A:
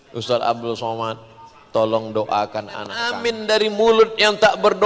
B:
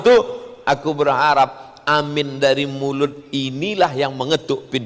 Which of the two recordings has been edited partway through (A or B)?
A